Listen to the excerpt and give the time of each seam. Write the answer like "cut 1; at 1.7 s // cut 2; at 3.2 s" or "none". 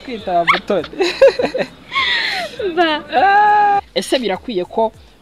cut 1; at 3.8 s